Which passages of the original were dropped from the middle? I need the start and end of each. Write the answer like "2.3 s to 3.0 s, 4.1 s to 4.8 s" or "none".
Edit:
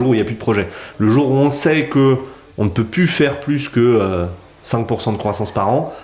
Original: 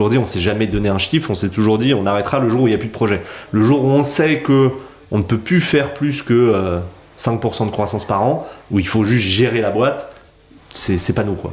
none